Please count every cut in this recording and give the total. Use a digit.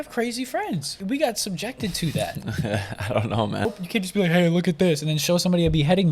2